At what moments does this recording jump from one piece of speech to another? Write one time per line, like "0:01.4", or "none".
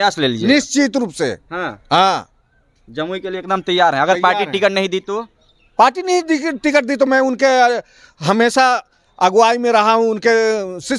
none

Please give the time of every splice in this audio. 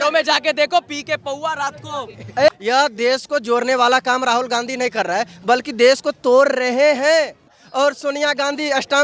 0:02.5
0:07.6

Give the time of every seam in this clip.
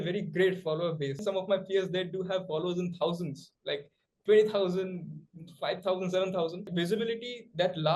0:01.2
0:06.7

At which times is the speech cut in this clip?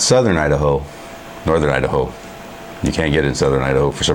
none

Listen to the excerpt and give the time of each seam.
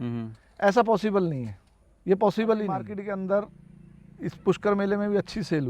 0:02.9

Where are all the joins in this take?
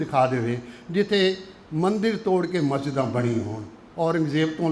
none

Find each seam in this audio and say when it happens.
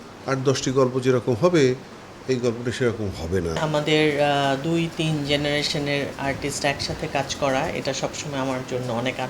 0:03.6

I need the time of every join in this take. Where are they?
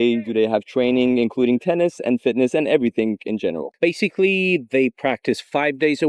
0:03.7

